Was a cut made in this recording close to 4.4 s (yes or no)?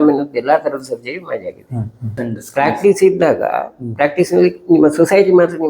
no